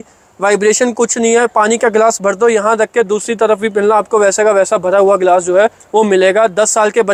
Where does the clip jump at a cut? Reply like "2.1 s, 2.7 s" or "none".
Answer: none